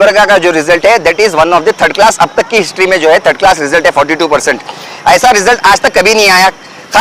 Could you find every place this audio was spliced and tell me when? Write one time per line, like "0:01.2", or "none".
none